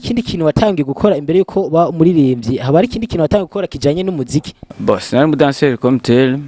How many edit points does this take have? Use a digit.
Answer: 1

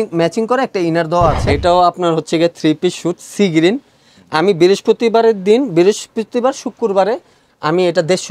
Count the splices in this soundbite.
1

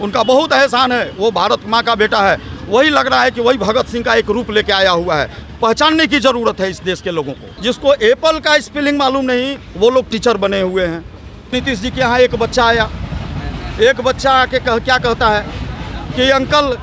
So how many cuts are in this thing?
2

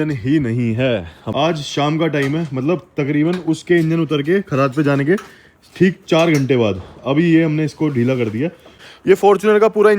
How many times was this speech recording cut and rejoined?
2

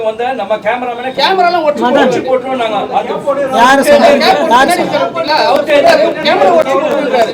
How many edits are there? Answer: 1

